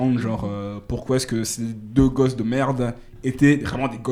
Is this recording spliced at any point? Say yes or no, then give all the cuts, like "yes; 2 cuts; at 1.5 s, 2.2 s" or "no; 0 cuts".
no; 0 cuts